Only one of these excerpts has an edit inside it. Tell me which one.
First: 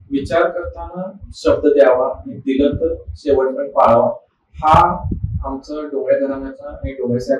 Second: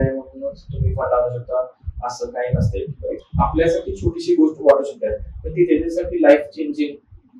second; 1 cut; at 3.2 s

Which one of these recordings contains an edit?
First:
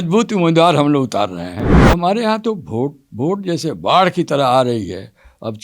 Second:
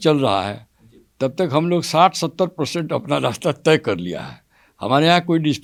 first; 1 cut; at 1.7 s

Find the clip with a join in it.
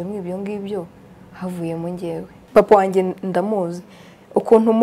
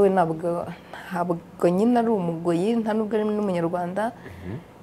first; 1 cut; at 2.4 s

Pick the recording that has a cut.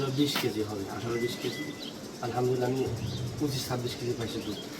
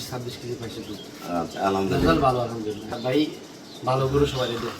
second; 1 cut; at 2.9 s

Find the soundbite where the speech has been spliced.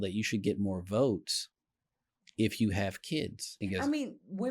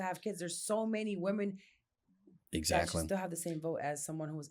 first; 1 cut; at 3.4 s

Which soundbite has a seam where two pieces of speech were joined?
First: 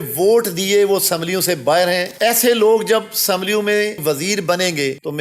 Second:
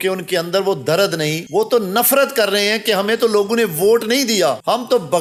first; 2 cuts; at 2.1 s, 4.0 s

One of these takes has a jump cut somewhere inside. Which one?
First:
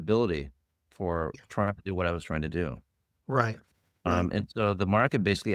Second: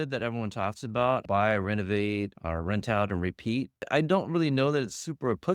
second; 3 cuts; at 1.2 s, 2.4 s, 3.9 s

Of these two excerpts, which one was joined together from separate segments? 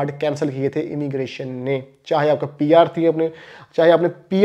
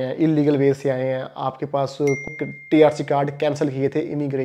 second; 1 cut; at 2.3 s

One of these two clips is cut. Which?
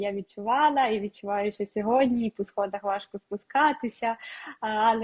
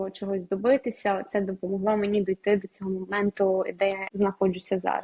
second; 1 cut; at 4.0 s

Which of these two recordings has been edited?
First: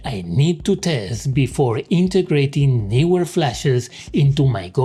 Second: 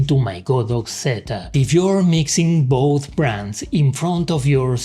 second; 1 cut; at 1.5 s

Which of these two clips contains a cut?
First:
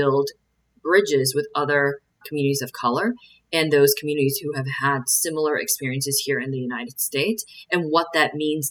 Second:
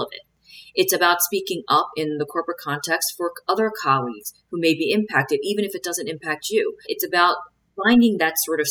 second; 1 cut; at 6.9 s

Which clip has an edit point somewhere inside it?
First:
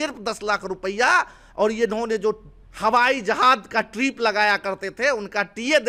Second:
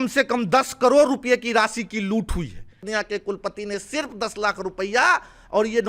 second; 1 cut; at 2.9 s

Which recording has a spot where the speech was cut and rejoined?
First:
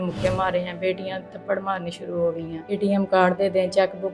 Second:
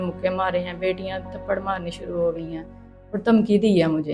first; 1 cut; at 2.8 s

